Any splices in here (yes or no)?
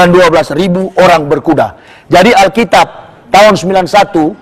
no